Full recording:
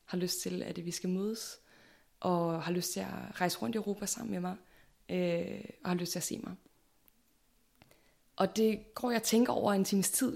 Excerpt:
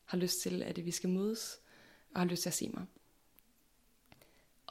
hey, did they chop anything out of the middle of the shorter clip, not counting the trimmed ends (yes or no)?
yes